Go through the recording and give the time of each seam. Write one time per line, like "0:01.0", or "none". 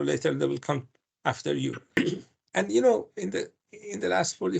0:01.8